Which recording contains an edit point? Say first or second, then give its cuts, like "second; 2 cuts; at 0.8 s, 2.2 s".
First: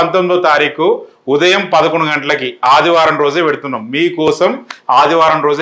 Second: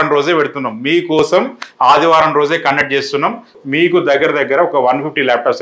second; 1 cut; at 3.6 s